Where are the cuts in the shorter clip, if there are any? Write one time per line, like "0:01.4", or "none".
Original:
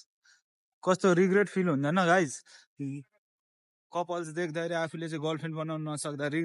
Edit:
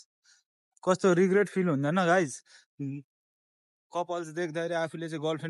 none